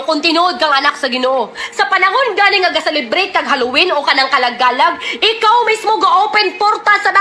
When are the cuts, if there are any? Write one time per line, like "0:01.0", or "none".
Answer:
0:03.1

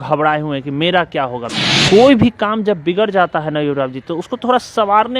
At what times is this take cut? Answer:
0:01.5

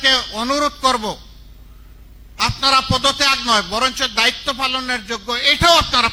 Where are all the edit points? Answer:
none

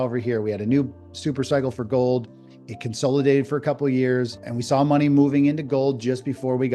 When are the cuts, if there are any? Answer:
0:04.5

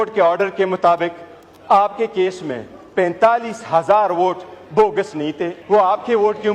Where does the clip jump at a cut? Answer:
0:05.5

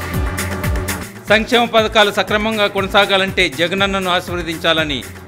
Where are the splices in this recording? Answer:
0:01.0

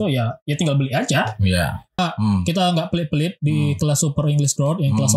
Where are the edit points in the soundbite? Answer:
0:02.0

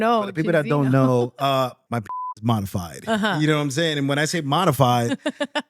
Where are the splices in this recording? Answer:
0:02.2

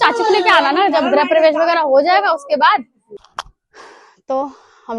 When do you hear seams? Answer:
0:03.2

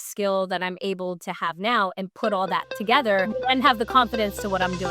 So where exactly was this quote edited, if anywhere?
0:03.3

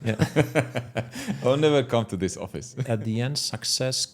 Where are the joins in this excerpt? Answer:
0:02.7

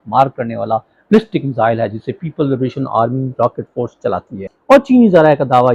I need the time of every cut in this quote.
0:04.5

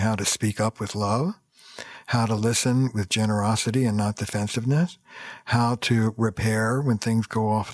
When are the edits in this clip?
none

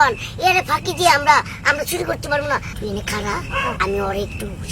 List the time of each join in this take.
0:02.7

